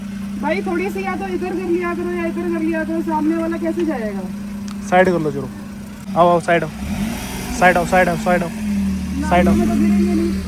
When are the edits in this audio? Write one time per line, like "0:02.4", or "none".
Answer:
none

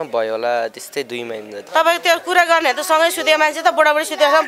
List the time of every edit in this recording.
0:01.7

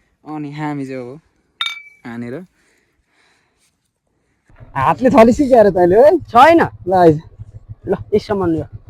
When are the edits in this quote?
0:04.3

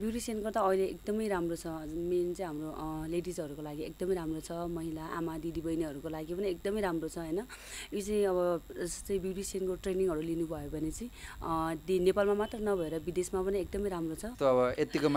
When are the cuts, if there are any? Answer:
0:14.3

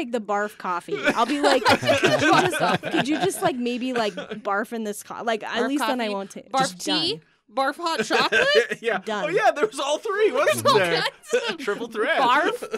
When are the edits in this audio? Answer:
none

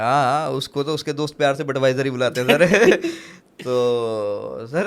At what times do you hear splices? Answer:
none

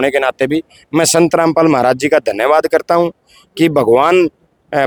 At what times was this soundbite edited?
none

